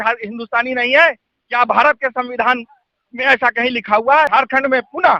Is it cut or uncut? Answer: cut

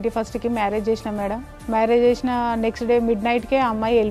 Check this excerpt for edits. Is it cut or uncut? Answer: uncut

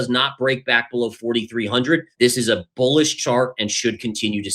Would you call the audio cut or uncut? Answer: cut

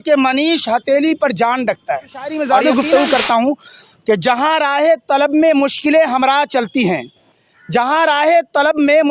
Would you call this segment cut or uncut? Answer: cut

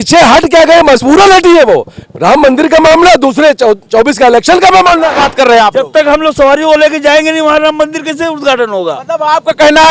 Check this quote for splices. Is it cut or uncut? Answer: cut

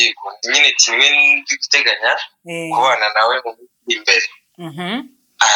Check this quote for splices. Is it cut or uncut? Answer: uncut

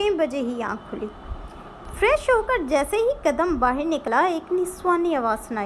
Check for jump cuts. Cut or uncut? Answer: cut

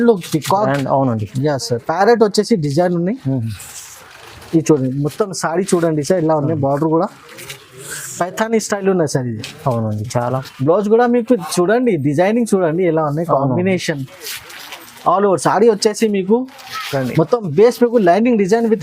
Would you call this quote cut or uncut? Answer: cut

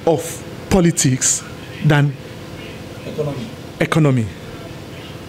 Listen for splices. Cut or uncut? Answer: uncut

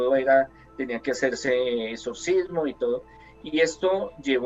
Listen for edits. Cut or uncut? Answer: uncut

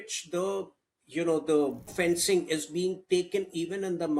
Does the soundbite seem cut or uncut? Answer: cut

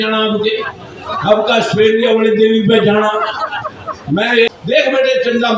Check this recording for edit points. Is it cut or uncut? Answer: cut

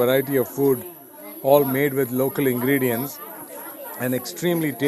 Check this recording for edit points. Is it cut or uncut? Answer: uncut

